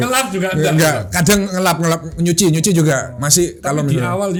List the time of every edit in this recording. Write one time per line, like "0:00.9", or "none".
none